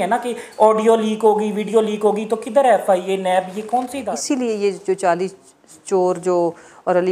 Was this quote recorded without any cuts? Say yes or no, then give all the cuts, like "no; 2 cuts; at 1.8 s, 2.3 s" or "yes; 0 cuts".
no; 1 cut; at 4.1 s